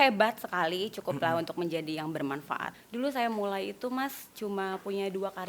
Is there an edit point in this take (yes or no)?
yes